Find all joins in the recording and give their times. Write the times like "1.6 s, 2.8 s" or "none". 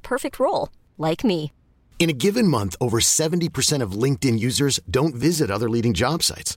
none